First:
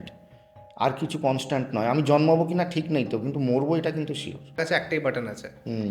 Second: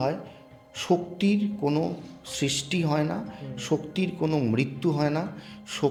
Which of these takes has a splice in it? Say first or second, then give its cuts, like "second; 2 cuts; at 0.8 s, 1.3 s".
first; 1 cut; at 4.6 s